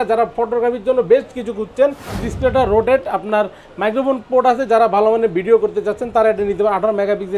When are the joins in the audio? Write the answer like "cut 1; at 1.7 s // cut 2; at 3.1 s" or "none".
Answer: cut 1; at 2.1 s